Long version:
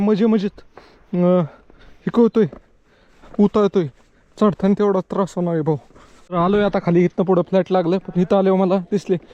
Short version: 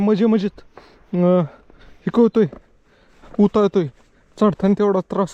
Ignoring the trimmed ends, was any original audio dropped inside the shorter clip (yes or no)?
no